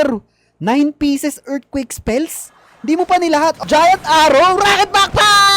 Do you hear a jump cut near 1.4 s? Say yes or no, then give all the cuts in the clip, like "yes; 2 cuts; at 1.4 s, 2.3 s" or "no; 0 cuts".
no; 1 cut; at 3.6 s